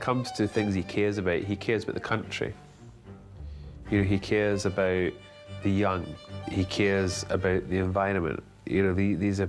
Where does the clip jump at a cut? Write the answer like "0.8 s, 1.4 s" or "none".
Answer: 6.3 s